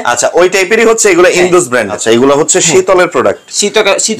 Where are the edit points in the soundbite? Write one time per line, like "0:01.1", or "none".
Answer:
0:02.0